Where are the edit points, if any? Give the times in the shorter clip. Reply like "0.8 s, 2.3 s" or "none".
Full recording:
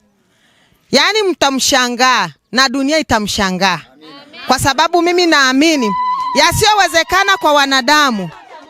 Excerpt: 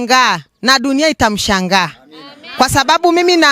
none